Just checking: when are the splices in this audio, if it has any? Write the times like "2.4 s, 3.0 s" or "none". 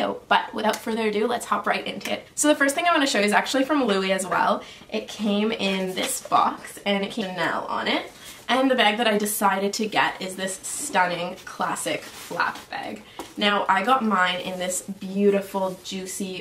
none